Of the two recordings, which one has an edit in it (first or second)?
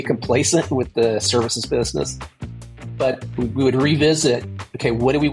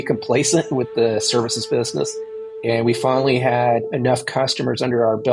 second